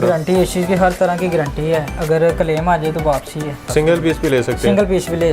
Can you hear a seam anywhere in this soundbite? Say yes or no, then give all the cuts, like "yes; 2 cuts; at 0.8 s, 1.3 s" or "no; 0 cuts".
yes; 1 cut; at 3.7 s